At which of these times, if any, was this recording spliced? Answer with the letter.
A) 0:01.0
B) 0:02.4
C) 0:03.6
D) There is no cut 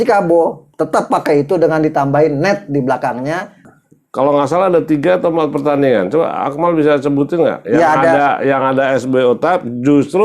C